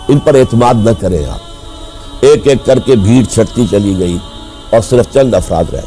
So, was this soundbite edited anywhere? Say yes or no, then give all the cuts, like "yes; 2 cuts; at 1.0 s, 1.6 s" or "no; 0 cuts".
yes; 1 cut; at 2.0 s